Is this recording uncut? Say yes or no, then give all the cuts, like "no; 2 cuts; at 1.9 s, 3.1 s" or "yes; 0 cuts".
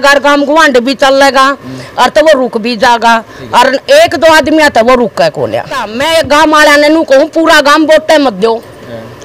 no; 1 cut; at 5.9 s